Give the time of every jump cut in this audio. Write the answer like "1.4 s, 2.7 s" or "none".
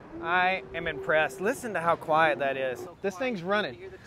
2.8 s